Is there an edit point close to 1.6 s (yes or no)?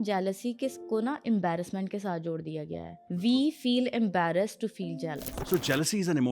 no